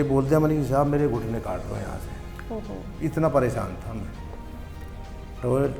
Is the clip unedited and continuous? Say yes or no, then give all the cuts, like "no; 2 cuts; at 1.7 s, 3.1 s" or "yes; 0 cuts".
yes; 0 cuts